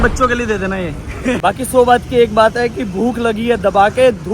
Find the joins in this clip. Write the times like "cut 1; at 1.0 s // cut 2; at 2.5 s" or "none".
cut 1; at 1.4 s